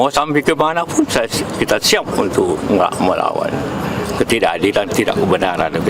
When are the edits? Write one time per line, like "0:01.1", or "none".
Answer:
none